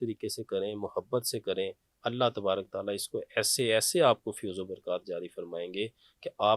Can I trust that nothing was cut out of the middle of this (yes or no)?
yes